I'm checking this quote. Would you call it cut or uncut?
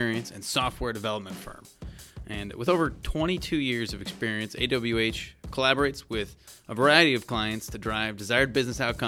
uncut